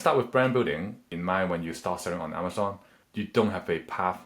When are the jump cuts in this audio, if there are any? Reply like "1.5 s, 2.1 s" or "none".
1.1 s, 3.0 s